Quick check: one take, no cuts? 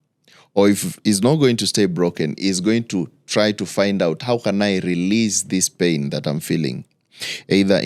yes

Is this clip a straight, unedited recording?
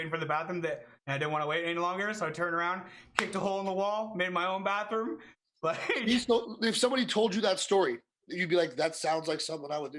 yes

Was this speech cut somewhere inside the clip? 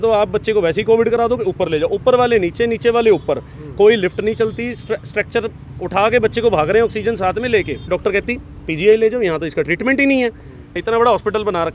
yes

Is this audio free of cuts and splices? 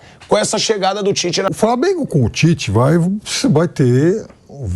no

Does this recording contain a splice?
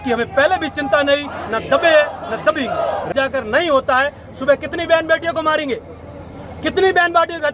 yes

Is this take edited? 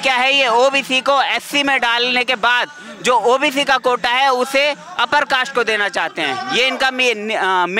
no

